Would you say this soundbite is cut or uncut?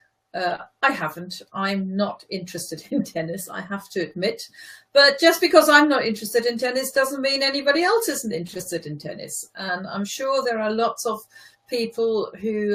cut